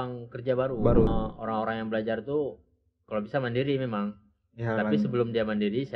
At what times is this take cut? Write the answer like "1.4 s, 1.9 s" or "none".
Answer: 1.1 s